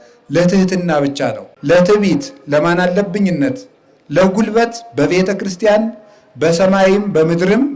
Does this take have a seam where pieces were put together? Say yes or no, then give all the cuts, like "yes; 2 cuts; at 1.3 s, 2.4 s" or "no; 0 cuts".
yes; 1 cut; at 1.5 s